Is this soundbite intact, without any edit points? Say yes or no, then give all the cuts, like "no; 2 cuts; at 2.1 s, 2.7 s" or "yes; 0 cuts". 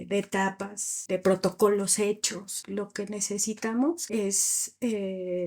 no; 3 cuts; at 0.9 s, 2.6 s, 4.0 s